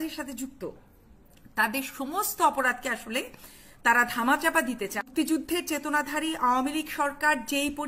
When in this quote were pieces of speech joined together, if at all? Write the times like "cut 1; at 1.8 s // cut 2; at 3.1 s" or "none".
cut 1; at 5.1 s